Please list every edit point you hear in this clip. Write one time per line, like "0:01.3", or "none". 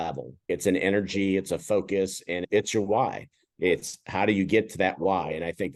none